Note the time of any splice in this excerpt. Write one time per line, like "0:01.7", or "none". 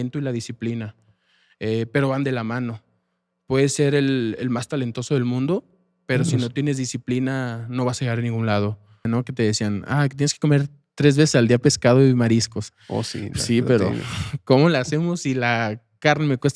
0:09.0

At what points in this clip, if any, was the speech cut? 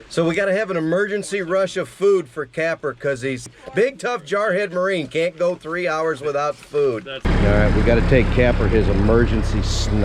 0:03.6
0:07.3

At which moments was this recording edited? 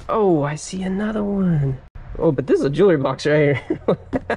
none

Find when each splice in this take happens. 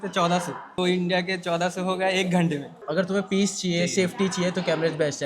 0:02.7

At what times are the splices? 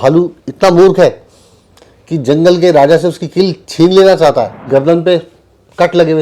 0:04.6

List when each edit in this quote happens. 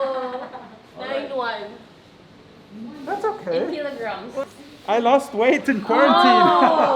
0:04.4

